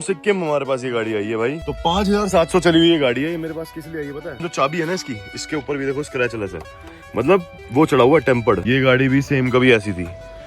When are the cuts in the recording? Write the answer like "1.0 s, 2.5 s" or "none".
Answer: 1.6 s, 4.4 s, 8.6 s